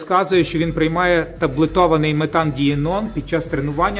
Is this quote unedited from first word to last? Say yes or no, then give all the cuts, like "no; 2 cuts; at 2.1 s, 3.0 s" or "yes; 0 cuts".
yes; 0 cuts